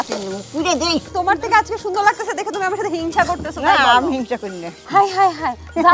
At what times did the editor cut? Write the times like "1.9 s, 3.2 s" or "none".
1.1 s, 4.8 s